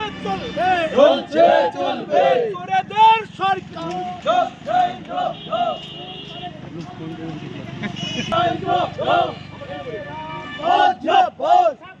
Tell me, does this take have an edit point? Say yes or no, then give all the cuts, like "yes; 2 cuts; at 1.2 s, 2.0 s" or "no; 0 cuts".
no; 0 cuts